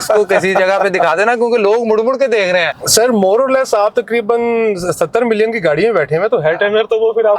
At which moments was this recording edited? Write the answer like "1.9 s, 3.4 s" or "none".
2.8 s